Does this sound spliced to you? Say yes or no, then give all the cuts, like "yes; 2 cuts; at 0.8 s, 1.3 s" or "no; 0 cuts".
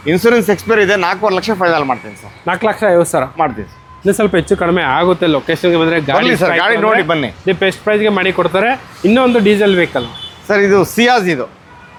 no; 0 cuts